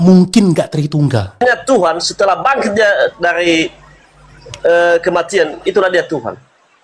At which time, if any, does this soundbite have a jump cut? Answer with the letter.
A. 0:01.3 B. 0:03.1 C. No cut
A